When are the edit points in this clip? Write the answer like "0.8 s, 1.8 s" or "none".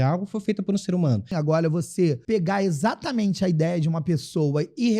1.3 s, 2.2 s